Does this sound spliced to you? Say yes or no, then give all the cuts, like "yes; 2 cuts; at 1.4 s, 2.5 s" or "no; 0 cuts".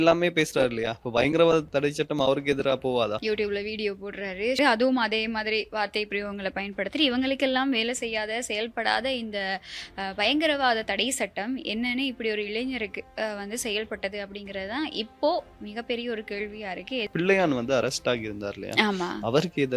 yes; 3 cuts; at 3.2 s, 4.6 s, 17.1 s